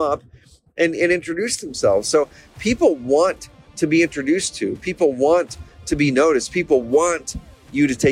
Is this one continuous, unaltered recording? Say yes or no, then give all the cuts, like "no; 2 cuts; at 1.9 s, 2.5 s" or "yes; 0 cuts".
yes; 0 cuts